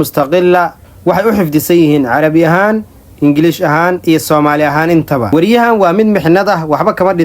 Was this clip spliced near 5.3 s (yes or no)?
yes